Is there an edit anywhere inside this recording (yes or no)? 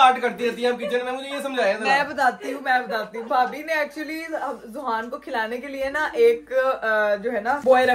no